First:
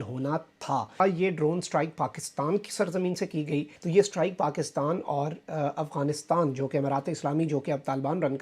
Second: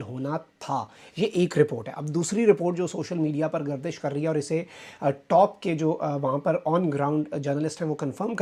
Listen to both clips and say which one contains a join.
first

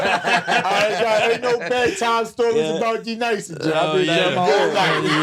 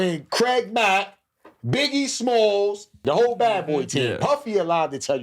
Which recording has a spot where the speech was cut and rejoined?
second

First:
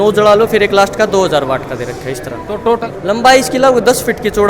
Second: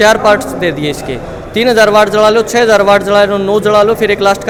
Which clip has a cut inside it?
first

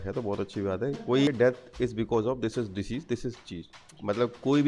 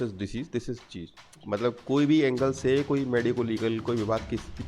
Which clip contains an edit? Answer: first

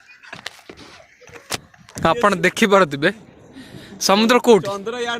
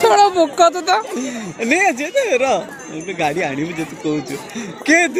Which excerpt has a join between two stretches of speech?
first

